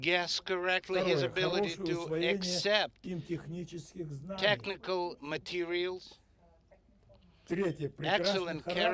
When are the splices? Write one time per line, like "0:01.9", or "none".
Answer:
0:03.0